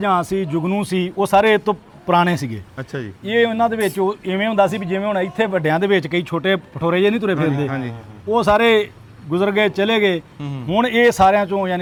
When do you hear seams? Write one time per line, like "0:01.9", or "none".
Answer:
none